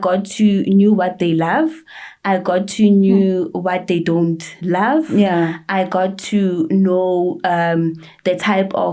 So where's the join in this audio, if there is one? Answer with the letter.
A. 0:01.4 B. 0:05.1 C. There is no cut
C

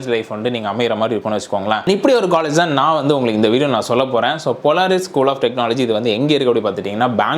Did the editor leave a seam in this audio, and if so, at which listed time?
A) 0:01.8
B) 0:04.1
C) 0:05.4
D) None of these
A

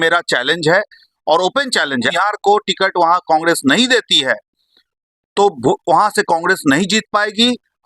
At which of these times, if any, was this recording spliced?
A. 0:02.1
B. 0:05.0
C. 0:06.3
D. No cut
A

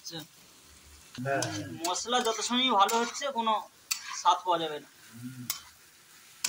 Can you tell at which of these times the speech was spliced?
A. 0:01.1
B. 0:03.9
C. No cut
A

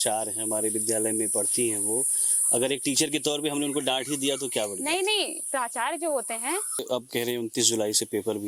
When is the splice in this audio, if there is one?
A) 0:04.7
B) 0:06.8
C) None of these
B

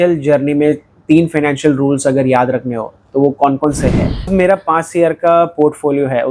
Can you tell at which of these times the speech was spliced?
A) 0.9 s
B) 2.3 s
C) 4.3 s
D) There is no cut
C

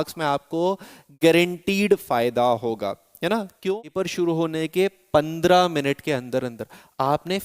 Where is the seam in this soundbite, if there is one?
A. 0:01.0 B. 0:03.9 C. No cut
B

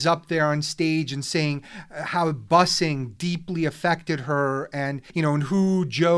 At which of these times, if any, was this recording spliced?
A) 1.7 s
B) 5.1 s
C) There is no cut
B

